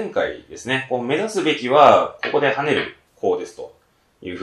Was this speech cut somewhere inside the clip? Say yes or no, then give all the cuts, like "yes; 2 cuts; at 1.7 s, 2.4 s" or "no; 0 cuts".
yes; 1 cut; at 3.0 s